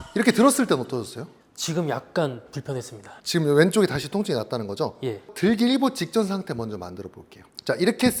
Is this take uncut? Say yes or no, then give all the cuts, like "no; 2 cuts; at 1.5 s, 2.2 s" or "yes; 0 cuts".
yes; 0 cuts